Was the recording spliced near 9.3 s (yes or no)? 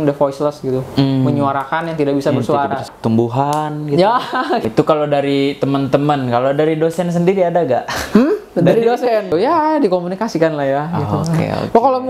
yes